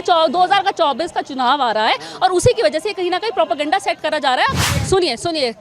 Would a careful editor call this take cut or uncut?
cut